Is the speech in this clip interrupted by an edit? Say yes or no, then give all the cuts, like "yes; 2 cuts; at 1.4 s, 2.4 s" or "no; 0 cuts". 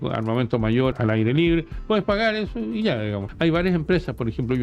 yes; 2 cuts; at 0.9 s, 3.2 s